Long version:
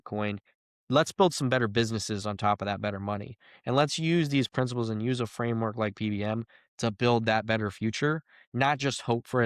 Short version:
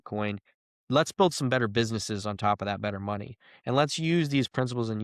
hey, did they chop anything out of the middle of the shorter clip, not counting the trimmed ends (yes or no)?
no